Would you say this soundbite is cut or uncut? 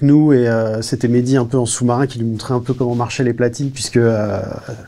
uncut